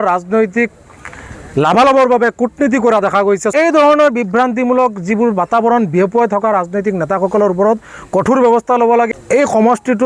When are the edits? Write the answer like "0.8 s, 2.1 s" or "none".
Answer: 3.5 s, 9.1 s